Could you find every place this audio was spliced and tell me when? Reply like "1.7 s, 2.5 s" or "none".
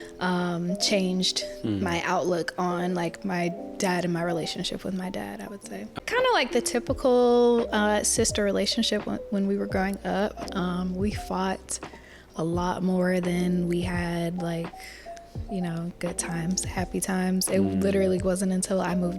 6.0 s